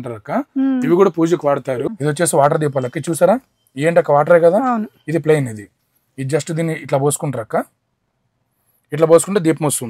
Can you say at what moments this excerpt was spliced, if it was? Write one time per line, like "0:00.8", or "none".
0:01.8

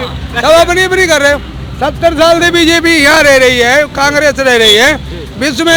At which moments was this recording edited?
none

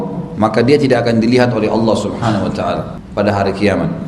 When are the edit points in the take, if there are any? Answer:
0:03.0

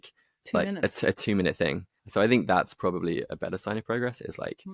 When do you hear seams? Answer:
0:01.9

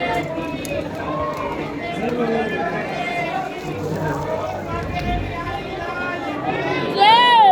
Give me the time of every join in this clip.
none

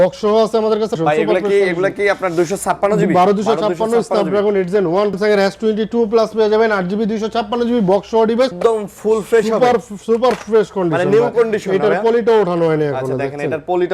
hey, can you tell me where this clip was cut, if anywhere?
0:01.0
0:05.2
0:08.5

